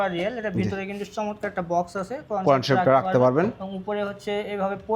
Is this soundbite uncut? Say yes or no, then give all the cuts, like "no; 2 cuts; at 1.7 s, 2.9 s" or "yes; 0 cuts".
yes; 0 cuts